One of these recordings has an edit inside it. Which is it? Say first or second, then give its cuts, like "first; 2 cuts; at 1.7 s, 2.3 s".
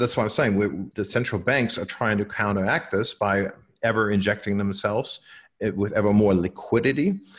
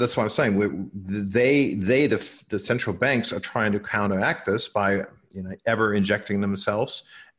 first; 2 cuts; at 0.9 s, 3.6 s